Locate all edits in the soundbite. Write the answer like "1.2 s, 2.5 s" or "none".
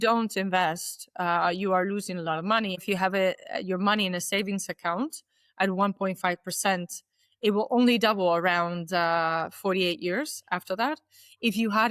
2.8 s